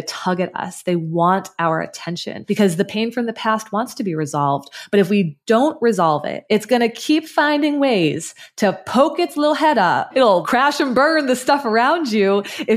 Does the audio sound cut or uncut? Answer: cut